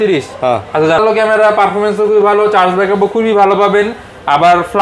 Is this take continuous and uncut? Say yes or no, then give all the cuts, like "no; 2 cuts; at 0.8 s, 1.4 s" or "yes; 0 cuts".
no; 1 cut; at 1.0 s